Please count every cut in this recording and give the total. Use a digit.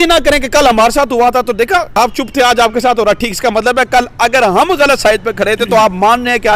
1